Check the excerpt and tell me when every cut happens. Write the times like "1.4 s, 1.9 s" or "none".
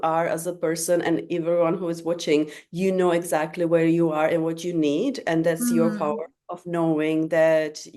none